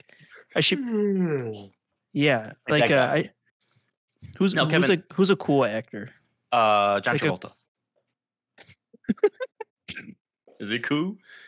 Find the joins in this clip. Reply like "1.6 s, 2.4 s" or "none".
none

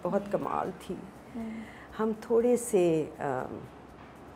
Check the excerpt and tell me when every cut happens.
none

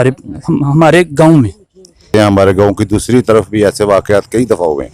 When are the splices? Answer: 2.1 s

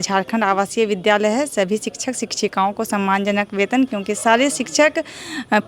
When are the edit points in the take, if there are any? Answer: none

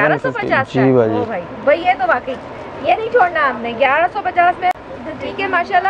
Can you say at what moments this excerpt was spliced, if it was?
4.8 s

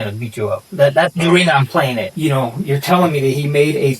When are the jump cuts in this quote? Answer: 2.1 s

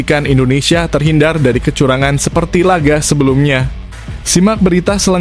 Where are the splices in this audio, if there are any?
none

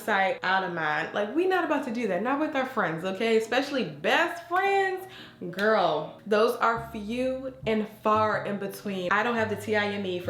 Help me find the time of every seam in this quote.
none

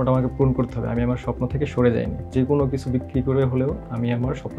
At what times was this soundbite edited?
none

